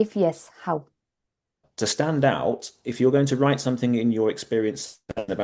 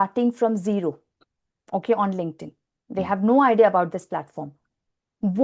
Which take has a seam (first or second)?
first